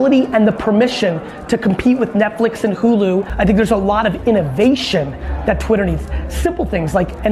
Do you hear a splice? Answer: yes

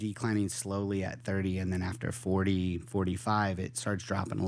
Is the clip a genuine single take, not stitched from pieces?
yes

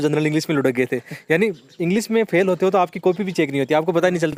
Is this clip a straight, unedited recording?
yes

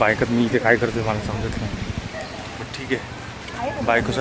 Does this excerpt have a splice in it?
no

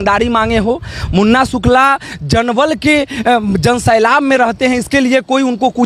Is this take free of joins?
yes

